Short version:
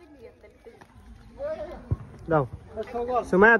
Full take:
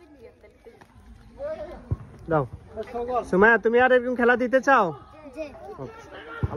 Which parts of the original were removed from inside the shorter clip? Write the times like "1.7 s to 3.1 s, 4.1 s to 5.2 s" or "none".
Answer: none